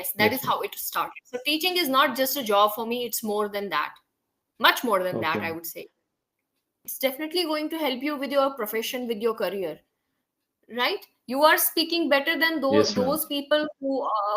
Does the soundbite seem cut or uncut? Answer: cut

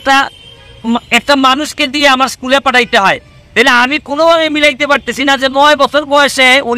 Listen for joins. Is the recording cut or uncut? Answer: uncut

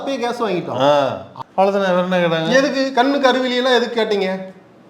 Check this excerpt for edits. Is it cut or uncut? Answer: cut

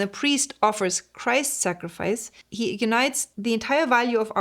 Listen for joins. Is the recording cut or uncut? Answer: cut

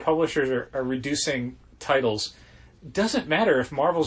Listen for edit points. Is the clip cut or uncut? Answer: cut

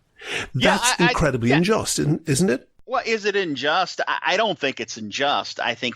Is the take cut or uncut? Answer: cut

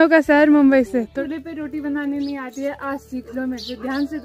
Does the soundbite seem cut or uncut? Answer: cut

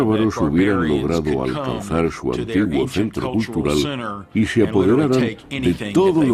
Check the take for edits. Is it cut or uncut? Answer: uncut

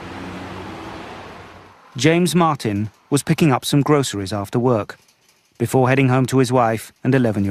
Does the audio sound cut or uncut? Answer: uncut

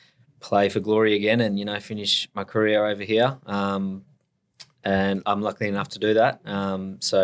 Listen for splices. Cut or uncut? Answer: uncut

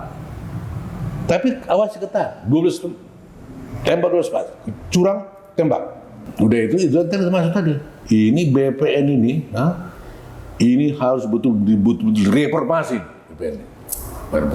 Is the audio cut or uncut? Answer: cut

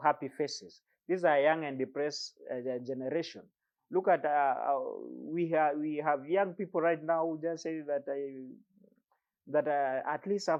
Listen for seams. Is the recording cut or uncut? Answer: uncut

